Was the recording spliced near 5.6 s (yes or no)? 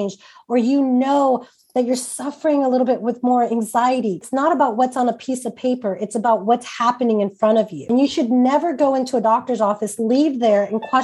no